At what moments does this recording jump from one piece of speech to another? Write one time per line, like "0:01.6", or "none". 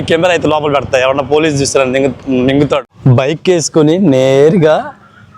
0:02.9